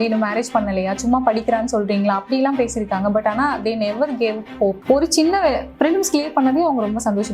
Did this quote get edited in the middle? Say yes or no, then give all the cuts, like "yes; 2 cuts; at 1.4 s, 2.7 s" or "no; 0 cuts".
yes; 1 cut; at 4.8 s